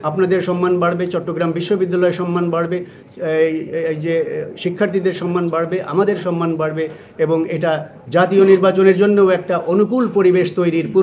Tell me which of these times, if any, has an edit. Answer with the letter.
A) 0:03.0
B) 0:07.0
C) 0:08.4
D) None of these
D